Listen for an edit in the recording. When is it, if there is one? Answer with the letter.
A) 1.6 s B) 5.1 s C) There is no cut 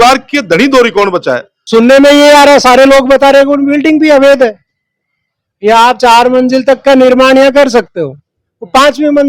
A